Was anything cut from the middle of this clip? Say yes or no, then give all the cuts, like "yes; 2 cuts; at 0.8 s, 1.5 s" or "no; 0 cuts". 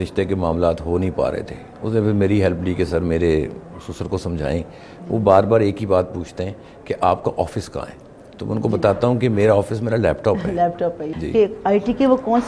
yes; 1 cut; at 11.1 s